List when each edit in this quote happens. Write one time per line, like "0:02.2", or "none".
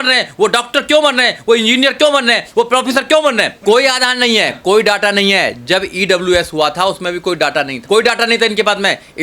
0:03.5
0:07.8